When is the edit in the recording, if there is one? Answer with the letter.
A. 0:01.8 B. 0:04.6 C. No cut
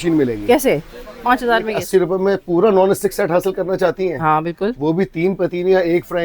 A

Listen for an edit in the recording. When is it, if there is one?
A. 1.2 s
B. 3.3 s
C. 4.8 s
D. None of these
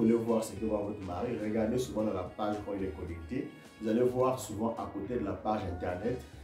D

